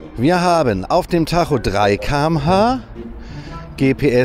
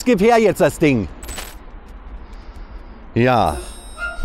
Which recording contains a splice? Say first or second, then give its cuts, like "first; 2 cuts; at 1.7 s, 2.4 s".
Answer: second; 1 cut; at 1.6 s